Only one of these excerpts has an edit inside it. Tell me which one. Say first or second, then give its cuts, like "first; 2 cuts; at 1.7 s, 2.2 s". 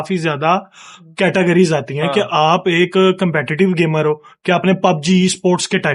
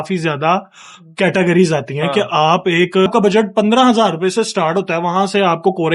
second; 1 cut; at 3.1 s